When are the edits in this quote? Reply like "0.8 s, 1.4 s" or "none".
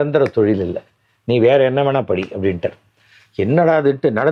none